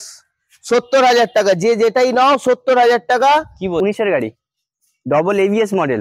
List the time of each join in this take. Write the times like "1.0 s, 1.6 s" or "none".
3.8 s